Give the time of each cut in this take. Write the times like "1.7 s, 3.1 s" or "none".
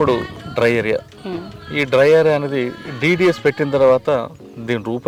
none